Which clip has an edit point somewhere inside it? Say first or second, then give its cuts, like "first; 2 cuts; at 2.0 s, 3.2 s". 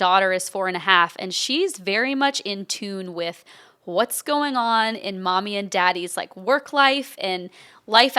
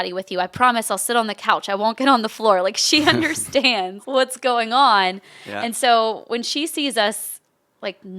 second; 1 cut; at 4.0 s